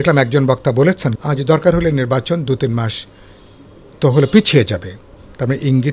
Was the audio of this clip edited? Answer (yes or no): yes